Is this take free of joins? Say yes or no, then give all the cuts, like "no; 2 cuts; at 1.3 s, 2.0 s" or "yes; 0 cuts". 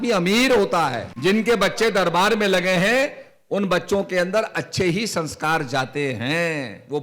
no; 1 cut; at 1.1 s